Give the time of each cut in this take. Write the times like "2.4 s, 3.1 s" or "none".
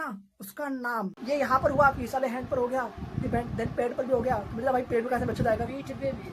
1.2 s